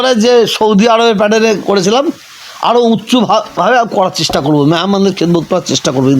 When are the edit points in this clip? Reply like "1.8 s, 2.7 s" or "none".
none